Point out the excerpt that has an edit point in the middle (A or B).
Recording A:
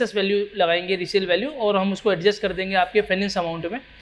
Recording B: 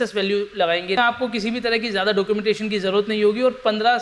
B